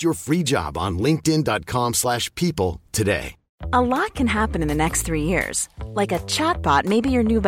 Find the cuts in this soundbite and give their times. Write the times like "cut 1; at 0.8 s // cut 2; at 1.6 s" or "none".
cut 1; at 3.6 s